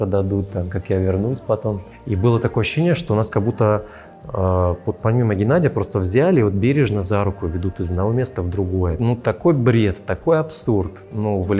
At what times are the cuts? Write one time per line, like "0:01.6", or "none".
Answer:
0:01.9
0:09.0